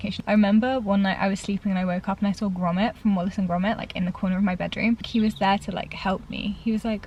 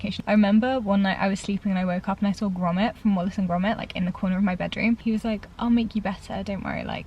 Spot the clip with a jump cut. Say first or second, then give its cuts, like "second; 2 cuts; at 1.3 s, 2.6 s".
second; 1 cut; at 5.0 s